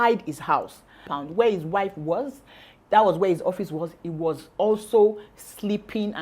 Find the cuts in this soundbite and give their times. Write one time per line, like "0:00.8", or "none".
0:01.1